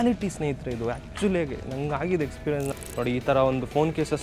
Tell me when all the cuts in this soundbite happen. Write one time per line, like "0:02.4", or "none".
0:02.7